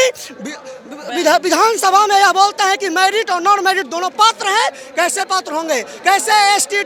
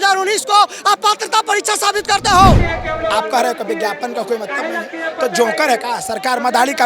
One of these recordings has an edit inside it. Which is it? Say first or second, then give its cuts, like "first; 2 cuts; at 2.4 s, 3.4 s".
second; 1 cut; at 2.7 s